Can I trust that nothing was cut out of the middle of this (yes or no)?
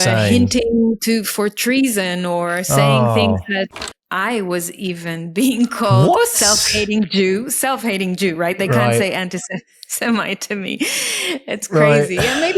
no